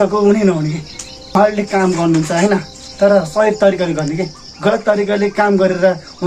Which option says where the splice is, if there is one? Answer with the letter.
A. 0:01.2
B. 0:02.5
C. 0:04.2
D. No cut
D